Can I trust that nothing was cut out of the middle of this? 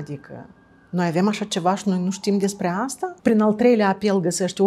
no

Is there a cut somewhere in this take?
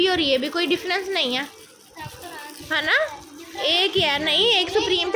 no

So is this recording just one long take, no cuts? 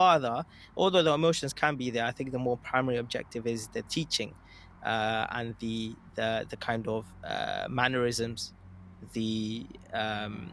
yes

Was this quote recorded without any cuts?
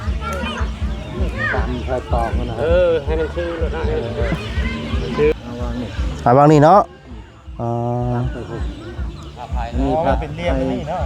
no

